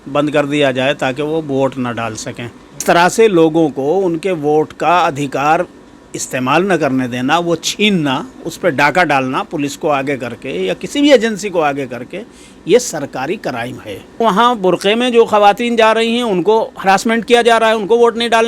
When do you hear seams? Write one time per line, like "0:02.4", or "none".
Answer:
0:02.8
0:14.2